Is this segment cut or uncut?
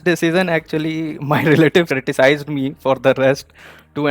uncut